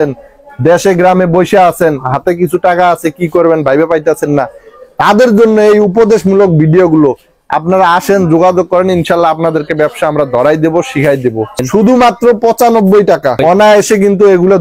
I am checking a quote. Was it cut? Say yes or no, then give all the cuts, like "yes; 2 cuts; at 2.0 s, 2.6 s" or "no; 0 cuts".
yes; 2 cuts; at 11.6 s, 13.4 s